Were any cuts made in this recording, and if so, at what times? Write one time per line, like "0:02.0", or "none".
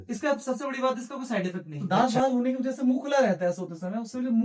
0:01.7